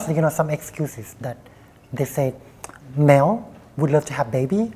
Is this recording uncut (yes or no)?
yes